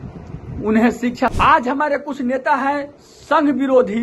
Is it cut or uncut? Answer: cut